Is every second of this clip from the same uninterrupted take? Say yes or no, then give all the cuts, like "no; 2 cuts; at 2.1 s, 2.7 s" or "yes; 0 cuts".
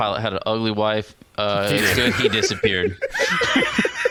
yes; 0 cuts